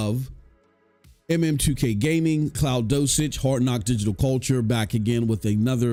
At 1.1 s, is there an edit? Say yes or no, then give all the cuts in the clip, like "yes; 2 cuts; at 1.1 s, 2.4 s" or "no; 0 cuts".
no; 0 cuts